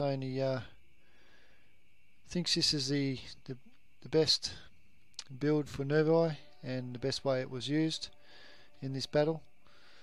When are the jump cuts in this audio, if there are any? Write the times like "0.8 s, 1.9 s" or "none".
2.5 s